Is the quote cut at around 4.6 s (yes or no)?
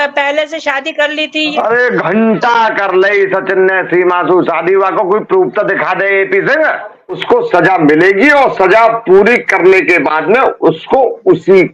no